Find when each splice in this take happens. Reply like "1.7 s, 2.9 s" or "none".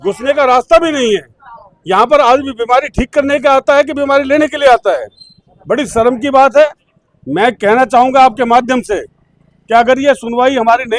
none